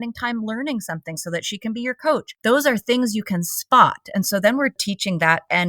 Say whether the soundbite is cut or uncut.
cut